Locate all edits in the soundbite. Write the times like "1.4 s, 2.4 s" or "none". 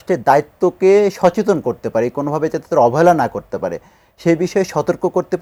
none